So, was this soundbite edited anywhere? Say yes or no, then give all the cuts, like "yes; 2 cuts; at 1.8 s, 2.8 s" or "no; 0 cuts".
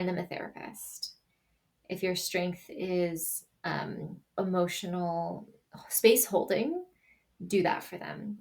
no; 0 cuts